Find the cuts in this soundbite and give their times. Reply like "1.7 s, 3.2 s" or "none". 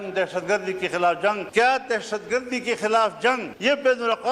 1.4 s, 3.5 s